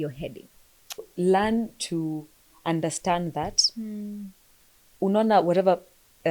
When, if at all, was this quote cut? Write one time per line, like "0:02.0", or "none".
0:01.1